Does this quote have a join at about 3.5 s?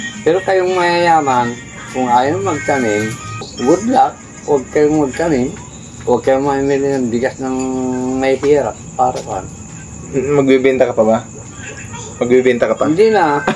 yes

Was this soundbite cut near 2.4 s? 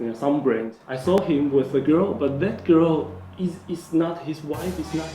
no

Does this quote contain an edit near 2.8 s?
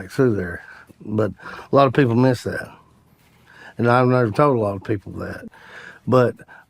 no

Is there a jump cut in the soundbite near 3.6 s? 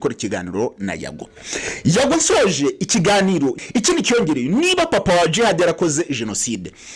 yes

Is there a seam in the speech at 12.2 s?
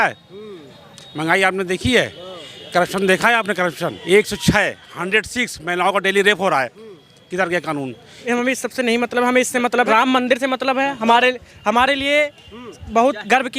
no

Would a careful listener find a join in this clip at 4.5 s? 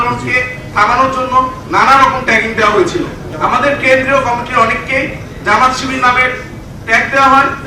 no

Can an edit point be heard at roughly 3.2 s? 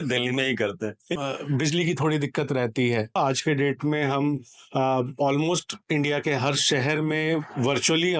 yes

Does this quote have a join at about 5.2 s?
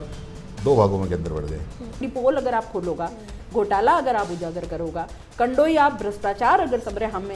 no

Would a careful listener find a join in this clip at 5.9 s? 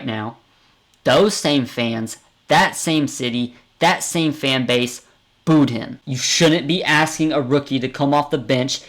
yes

